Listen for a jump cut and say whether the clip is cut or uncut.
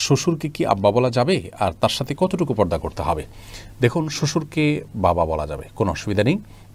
uncut